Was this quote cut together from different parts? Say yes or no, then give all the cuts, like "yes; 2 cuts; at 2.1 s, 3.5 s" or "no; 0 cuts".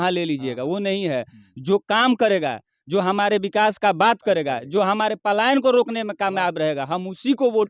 no; 0 cuts